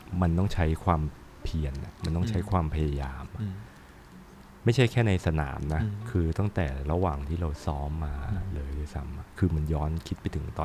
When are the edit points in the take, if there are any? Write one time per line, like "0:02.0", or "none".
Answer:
none